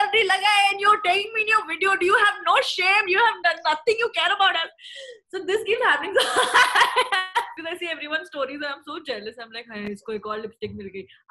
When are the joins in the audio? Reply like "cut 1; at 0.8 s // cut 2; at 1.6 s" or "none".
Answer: cut 1; at 7.6 s